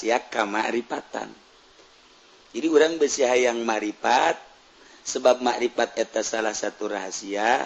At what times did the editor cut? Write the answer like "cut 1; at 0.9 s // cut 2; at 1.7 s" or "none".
none